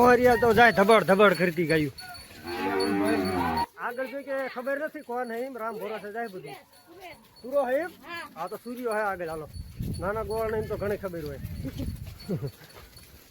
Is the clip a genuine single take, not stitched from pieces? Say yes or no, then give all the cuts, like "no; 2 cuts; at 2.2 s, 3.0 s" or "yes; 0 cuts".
no; 1 cut; at 3.7 s